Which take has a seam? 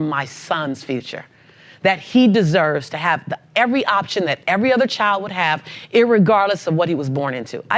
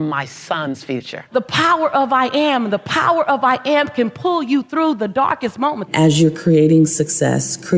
second; 2 cuts; at 1.2 s, 5.8 s

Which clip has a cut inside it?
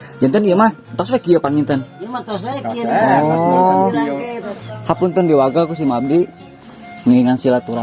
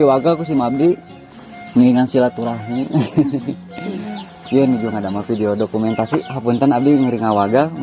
first; 1 cut; at 4.4 s

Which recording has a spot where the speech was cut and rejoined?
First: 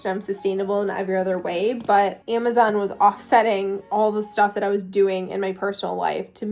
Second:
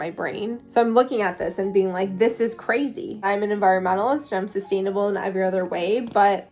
second; 1 cut; at 3.3 s

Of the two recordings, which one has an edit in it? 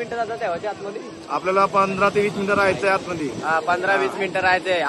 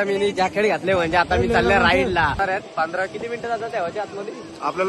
second; 1 cut; at 2.4 s

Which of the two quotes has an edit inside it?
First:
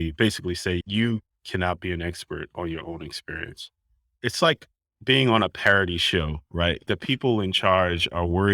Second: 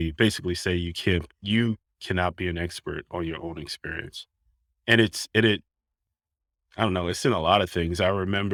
first; 3 cuts; at 0.9 s, 4.2 s, 6.8 s

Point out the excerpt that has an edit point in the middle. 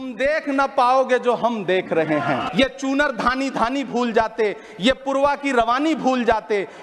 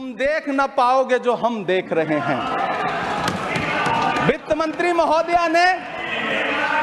first; 1 cut; at 2.5 s

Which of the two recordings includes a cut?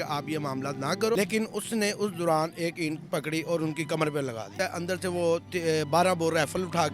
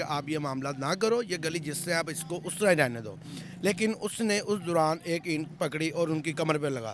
first; 2 cuts; at 1.2 s, 4.5 s

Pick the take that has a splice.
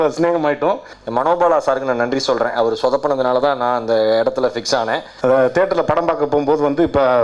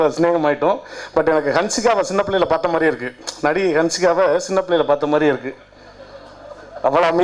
first; 2 cuts; at 0.9 s, 5.1 s

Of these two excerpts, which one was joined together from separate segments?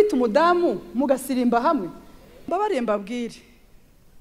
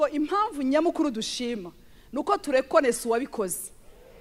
first; 1 cut; at 2.5 s

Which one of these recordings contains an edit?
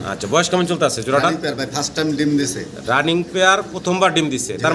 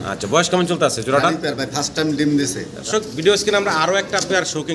second; 1 cut; at 2.8 s

